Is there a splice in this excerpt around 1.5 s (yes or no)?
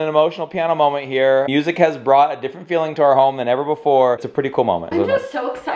yes